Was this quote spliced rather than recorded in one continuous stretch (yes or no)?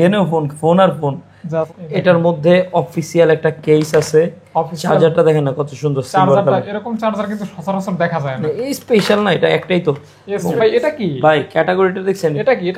yes